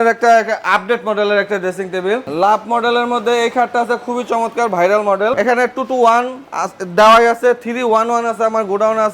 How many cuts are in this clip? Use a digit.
2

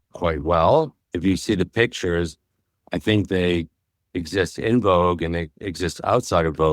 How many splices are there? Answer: 0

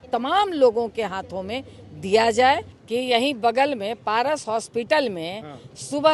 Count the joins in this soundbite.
1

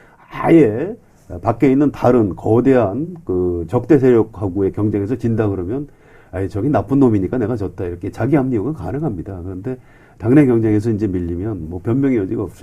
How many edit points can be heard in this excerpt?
1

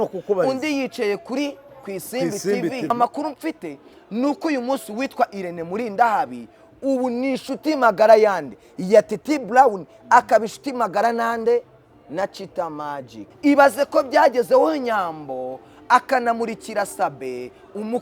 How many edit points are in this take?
2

